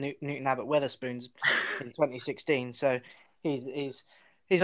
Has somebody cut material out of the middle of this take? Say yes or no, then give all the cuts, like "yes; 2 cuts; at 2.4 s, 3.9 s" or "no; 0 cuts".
no; 0 cuts